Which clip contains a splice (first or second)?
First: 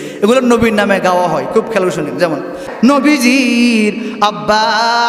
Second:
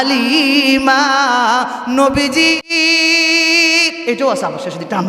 first